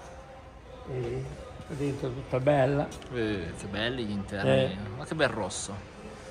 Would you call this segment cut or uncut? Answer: uncut